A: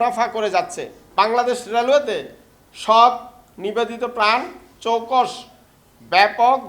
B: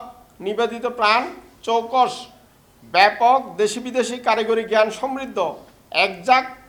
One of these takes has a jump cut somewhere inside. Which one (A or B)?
A